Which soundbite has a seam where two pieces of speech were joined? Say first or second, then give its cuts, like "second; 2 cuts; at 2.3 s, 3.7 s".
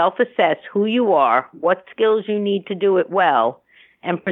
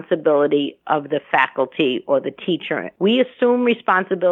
second; 1 cut; at 2.8 s